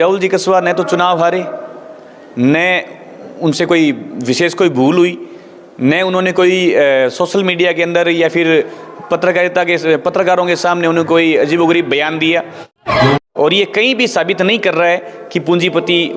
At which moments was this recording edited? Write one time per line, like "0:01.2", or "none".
0:13.1